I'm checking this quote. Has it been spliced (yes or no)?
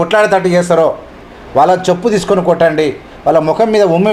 no